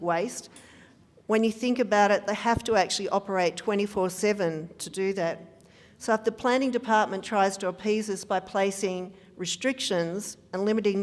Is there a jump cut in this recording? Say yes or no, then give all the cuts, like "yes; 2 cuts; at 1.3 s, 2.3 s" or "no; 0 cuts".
no; 0 cuts